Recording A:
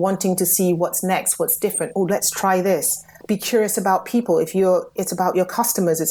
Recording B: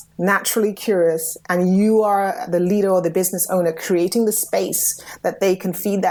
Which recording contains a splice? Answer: A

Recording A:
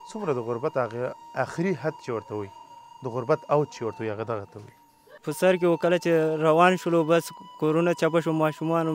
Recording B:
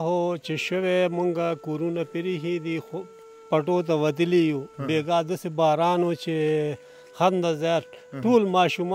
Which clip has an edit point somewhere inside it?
A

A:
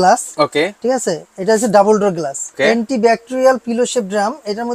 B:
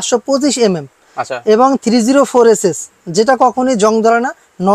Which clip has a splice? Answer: A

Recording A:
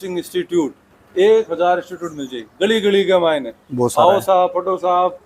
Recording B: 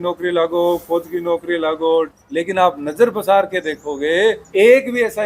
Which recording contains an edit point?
B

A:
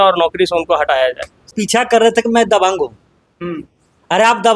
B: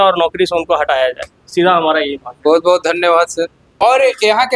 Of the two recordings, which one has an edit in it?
A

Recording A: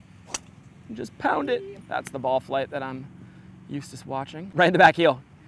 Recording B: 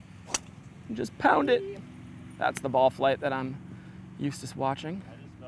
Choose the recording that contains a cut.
A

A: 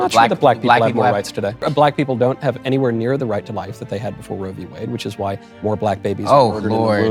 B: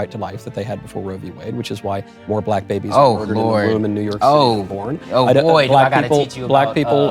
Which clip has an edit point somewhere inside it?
A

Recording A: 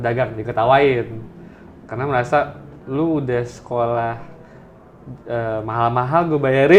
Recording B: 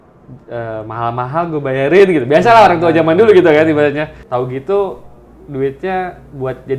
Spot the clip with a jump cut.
B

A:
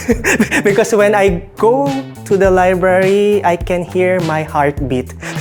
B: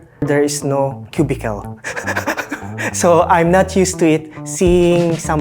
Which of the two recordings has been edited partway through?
B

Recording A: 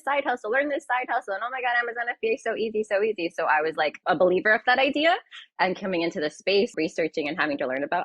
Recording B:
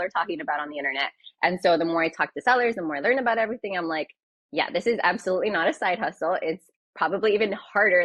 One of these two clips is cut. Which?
A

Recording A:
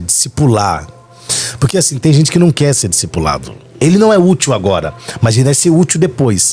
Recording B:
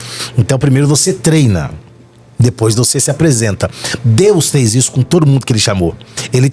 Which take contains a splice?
A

